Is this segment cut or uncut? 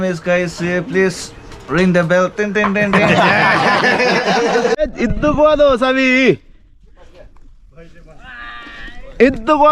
cut